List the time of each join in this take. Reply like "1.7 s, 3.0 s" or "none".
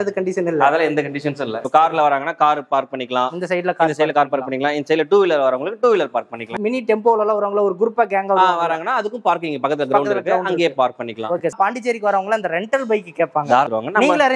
1.6 s, 6.5 s, 11.5 s, 13.4 s